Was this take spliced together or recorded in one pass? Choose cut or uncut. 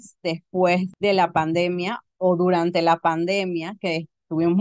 uncut